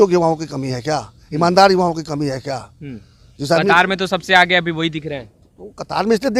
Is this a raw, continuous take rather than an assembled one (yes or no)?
yes